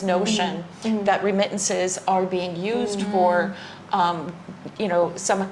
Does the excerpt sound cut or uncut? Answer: uncut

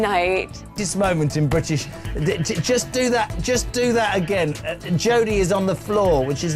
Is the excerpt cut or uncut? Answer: uncut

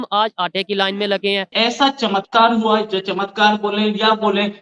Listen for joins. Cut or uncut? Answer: cut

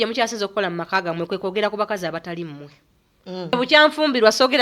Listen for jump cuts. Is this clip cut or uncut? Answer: cut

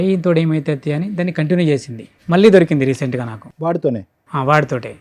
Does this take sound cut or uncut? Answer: uncut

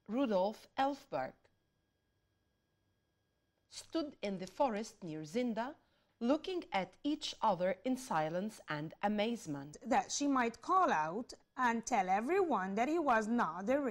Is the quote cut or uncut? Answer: cut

